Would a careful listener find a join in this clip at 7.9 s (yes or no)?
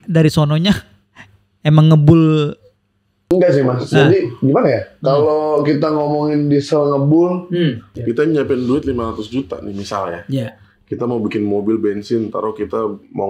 yes